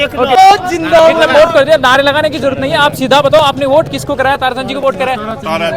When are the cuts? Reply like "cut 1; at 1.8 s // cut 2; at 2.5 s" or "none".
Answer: none